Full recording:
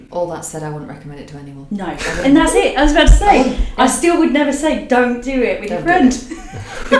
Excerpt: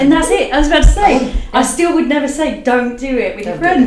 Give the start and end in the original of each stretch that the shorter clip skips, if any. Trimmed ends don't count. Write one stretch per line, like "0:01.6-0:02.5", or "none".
none